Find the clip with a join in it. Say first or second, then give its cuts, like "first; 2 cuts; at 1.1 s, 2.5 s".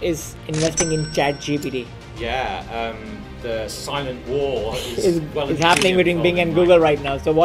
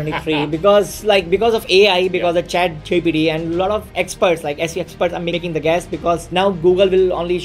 second; 3 cuts; at 3.9 s, 5.3 s, 6.2 s